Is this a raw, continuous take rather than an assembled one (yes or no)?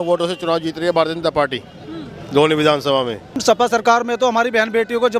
no